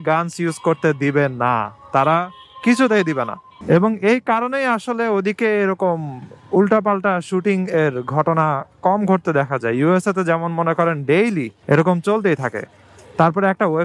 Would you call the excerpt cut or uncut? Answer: uncut